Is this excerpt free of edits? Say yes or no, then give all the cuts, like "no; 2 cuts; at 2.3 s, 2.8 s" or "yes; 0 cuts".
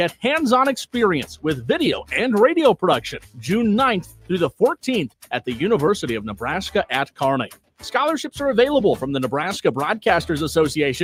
yes; 0 cuts